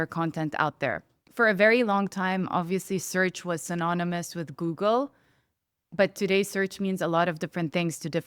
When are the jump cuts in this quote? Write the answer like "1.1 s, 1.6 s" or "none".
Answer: 1.2 s